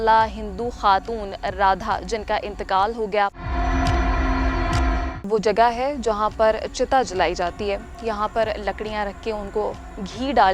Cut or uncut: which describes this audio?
cut